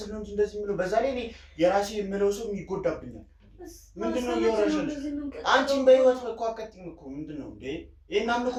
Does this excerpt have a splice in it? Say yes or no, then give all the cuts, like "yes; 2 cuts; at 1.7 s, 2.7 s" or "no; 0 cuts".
no; 0 cuts